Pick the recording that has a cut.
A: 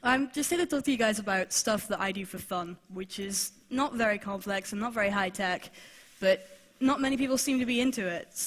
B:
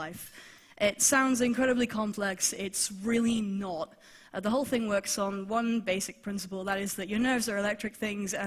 A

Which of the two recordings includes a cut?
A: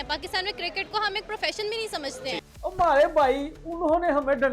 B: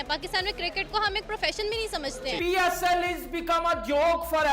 B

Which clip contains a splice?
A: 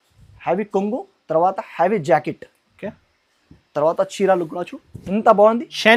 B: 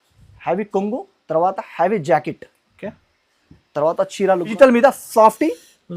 B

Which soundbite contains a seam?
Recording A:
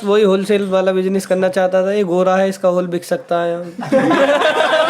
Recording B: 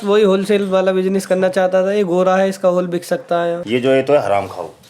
B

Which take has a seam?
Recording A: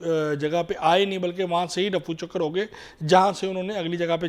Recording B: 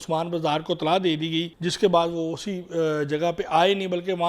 B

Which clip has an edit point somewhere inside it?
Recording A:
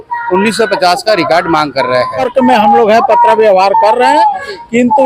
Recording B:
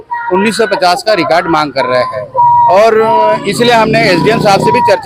A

